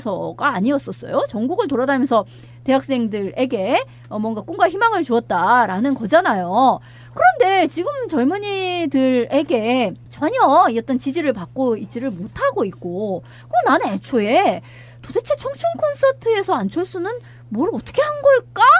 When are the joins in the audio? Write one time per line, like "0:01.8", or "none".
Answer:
none